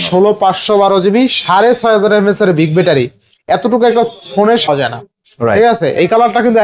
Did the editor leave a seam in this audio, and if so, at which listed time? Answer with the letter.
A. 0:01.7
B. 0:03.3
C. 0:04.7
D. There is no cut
C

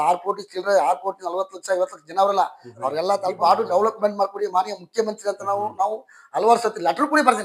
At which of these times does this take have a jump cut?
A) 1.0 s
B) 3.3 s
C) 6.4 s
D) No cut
B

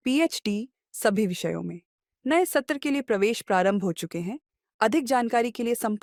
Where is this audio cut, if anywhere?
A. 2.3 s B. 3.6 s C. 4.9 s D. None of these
D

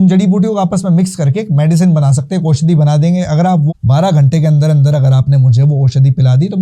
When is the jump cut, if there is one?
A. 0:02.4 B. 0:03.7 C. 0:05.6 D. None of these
B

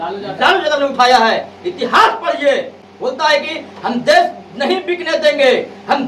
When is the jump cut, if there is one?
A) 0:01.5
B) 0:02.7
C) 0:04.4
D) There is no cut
D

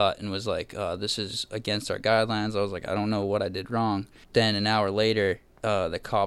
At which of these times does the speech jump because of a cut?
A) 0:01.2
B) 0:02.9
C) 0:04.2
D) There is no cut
C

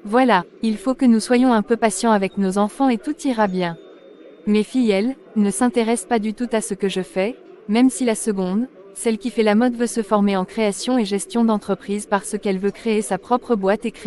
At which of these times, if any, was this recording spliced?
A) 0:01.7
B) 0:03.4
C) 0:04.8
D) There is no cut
D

